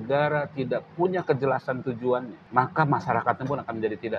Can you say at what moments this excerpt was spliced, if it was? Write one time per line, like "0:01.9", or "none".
0:02.4